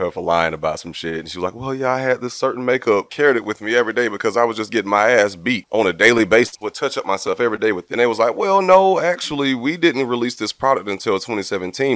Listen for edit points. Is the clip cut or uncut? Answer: cut